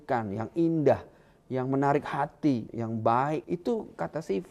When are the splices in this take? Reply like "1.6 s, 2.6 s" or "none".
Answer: 2.7 s, 3.4 s